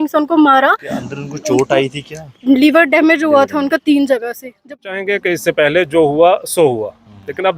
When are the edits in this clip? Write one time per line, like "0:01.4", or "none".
0:04.7